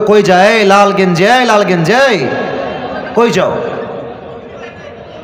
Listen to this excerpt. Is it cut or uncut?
uncut